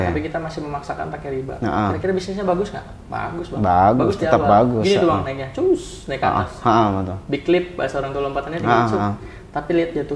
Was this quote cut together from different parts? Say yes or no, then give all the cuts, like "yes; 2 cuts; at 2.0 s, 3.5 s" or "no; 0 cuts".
no; 0 cuts